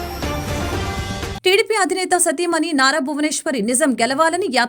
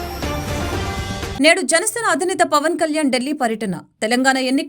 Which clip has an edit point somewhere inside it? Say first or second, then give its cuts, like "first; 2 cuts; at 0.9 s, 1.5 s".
second; 1 cut; at 1.3 s